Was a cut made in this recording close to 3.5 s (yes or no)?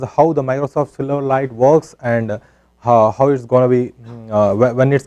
no